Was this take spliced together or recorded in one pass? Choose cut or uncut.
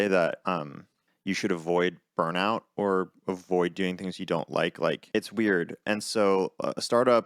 cut